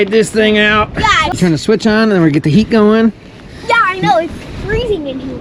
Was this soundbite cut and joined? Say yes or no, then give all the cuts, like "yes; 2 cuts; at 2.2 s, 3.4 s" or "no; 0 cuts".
yes; 1 cut; at 1.4 s